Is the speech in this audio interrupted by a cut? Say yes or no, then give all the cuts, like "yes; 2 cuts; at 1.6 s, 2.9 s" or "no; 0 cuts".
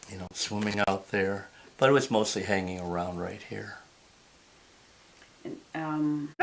yes; 1 cut; at 3.8 s